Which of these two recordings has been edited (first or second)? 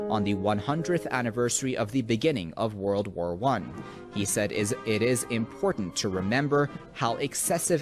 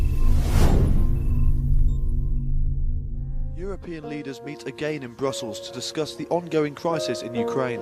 first